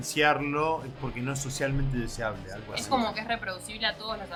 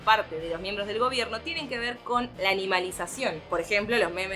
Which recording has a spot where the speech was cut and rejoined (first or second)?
second